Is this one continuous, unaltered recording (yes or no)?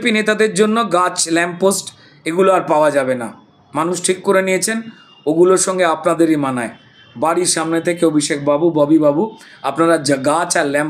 yes